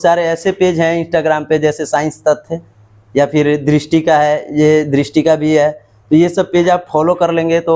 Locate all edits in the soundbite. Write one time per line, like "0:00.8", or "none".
none